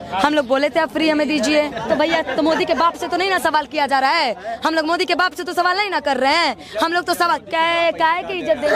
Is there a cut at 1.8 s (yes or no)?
yes